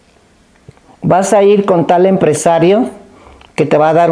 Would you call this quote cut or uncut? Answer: uncut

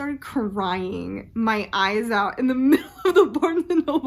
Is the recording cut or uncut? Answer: uncut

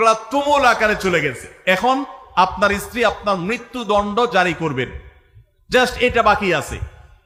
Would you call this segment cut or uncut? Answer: uncut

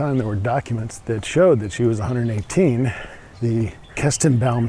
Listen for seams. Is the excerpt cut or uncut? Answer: cut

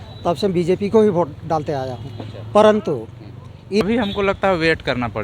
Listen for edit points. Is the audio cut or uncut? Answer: cut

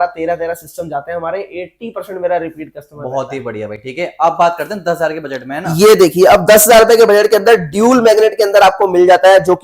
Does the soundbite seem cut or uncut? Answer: uncut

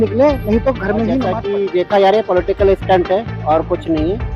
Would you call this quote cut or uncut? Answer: cut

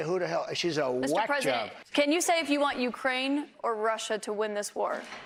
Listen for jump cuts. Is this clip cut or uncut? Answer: uncut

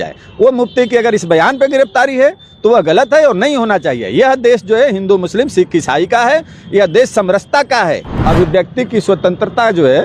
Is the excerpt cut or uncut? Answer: cut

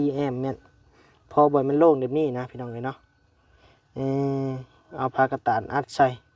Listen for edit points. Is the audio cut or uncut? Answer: uncut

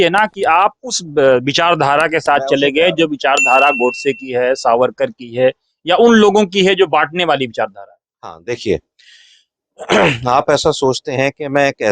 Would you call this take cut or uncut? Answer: uncut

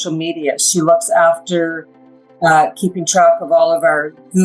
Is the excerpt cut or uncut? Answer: uncut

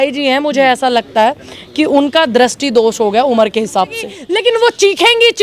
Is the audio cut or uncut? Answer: cut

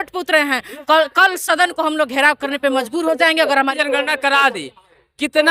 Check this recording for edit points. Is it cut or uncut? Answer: cut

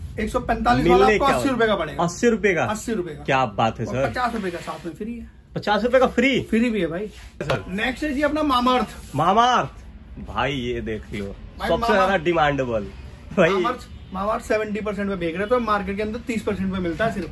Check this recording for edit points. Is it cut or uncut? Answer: cut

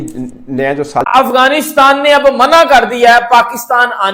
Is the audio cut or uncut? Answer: cut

